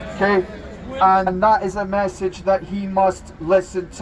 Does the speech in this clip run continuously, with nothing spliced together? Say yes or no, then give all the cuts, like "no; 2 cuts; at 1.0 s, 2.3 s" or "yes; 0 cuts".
no; 1 cut; at 1.3 s